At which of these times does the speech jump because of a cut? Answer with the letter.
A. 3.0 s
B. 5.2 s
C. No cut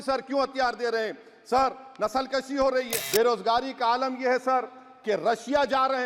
A